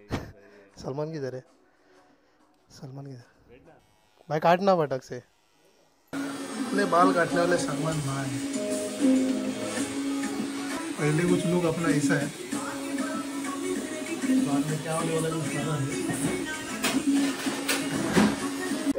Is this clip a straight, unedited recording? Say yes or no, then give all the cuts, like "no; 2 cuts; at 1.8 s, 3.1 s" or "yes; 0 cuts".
yes; 0 cuts